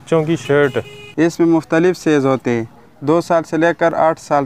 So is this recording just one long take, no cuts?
no; 1 cut; at 1.0 s

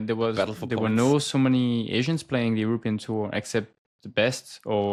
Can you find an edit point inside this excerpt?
no; 0 cuts

